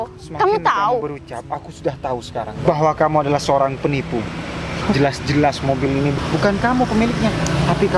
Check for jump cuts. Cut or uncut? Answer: cut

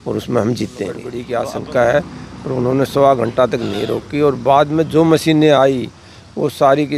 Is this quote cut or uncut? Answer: cut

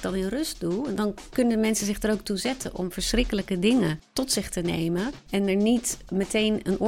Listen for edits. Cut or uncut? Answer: cut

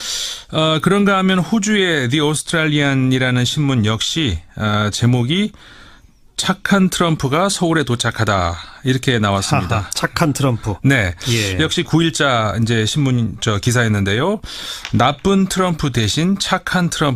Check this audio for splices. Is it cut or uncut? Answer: uncut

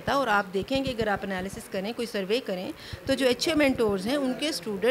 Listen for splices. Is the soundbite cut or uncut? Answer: uncut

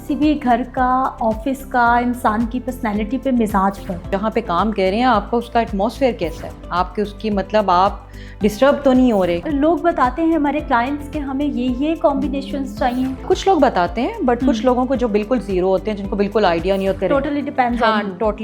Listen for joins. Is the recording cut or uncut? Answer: cut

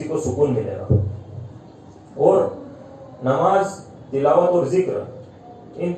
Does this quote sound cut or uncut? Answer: uncut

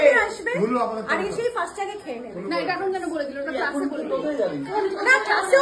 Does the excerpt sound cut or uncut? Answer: uncut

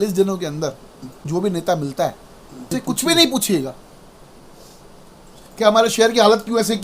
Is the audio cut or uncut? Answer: cut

